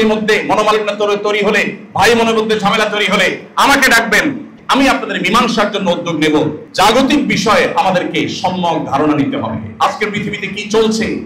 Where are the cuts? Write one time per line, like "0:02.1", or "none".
0:04.5
0:06.6